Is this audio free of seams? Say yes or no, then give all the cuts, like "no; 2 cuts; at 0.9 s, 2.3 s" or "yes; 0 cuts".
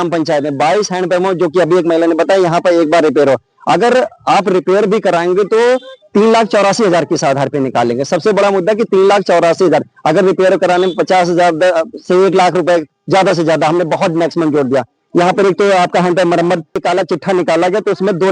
no; 1 cut; at 16.8 s